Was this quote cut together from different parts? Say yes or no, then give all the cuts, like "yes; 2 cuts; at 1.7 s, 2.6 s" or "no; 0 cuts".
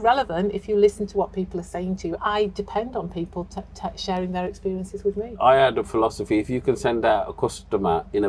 yes; 2 cuts; at 2.2 s, 5.4 s